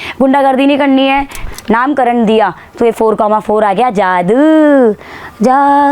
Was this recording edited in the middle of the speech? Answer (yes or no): yes